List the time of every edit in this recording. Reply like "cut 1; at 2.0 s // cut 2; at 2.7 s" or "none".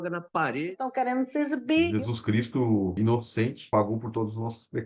none

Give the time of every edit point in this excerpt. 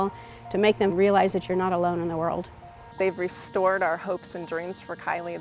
cut 1; at 0.9 s // cut 2; at 2.8 s

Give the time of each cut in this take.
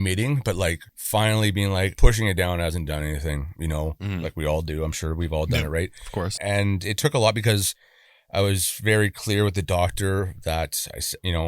cut 1; at 0.9 s // cut 2; at 1.9 s // cut 3; at 6.3 s

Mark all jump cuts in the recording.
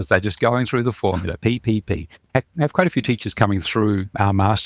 cut 1; at 2.2 s

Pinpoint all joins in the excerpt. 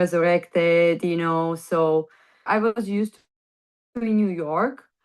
cut 1; at 2.3 s

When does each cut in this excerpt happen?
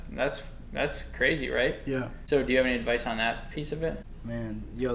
cut 1; at 2.1 s // cut 2; at 4.0 s

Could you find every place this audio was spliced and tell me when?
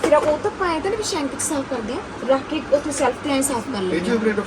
none

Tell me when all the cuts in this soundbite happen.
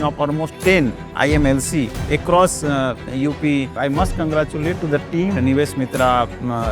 cut 1; at 3.7 s // cut 2; at 5.4 s

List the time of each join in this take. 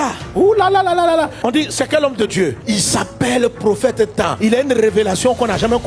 none

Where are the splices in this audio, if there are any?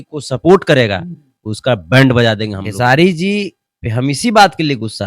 cut 1; at 2.6 s

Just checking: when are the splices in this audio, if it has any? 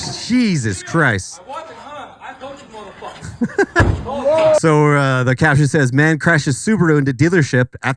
none

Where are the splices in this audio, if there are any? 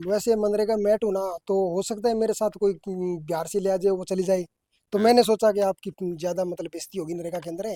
none

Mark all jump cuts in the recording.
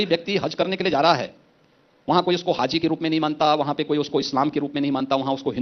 none

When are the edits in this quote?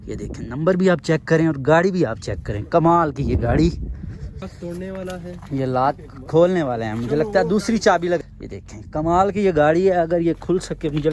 cut 1; at 4.5 s // cut 2; at 8.2 s

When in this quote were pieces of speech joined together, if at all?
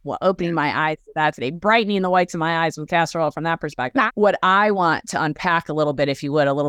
cut 1; at 4.1 s

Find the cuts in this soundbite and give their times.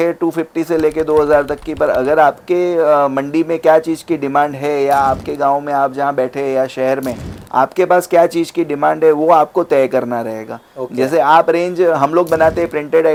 none

